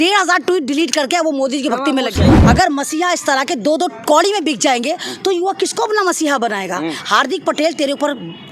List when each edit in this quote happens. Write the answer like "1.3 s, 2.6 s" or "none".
2.4 s